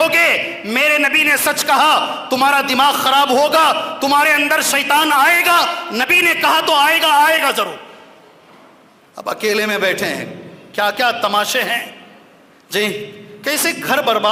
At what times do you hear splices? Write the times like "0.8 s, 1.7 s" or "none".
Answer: none